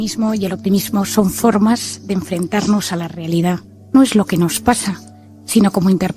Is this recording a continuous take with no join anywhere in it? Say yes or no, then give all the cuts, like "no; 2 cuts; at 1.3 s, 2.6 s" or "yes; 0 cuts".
yes; 0 cuts